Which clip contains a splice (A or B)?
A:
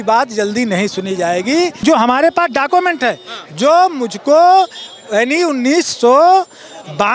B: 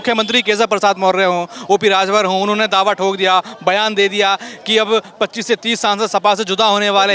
A